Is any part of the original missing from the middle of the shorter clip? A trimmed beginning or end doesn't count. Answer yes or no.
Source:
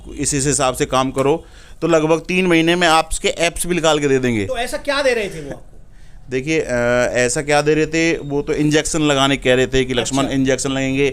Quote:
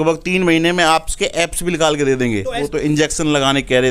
yes